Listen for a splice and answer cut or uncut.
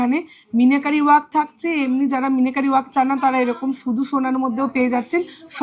uncut